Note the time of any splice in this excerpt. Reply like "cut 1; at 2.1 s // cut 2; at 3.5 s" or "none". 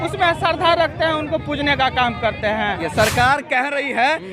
cut 1; at 2.8 s